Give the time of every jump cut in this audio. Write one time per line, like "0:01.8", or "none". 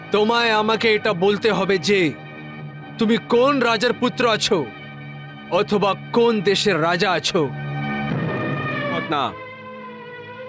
0:09.0